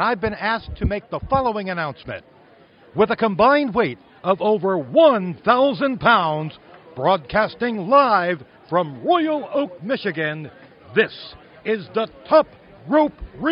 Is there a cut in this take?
no; 0 cuts

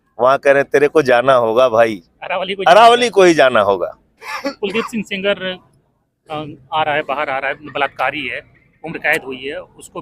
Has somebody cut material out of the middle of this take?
yes; 1 cut; at 4.3 s

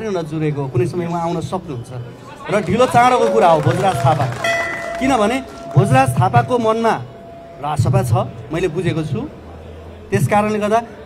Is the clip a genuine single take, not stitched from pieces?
yes; 0 cuts

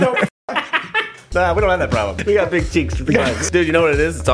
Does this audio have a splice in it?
yes; 3 cuts; at 1.3 s, 2.2 s, 3.4 s

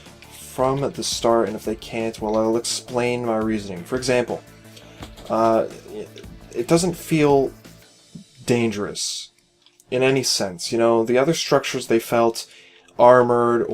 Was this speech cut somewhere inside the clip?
yes; 1 cut; at 10.4 s

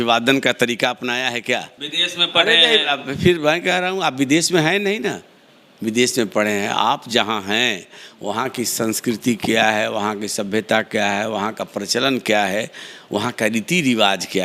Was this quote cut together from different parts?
yes; 1 cut; at 1.8 s

